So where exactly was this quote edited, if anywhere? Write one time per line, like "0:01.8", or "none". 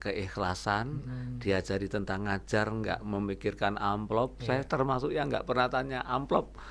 none